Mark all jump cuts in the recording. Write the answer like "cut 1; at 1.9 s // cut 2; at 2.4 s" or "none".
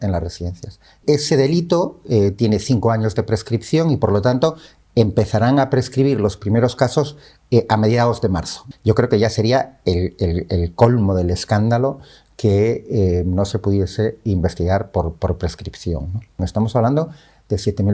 cut 1; at 1.0 s // cut 2; at 8.7 s // cut 3; at 16.4 s